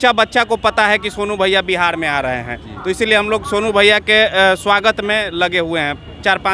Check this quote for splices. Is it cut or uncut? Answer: uncut